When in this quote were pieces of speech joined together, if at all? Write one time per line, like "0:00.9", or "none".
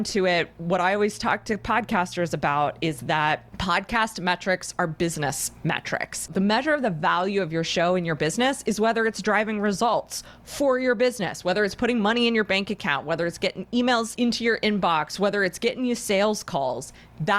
0:03.5
0:06.3
0:14.1